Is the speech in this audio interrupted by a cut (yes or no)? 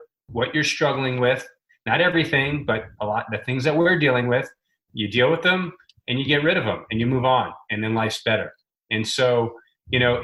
no